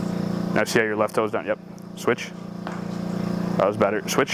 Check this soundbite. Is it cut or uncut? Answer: uncut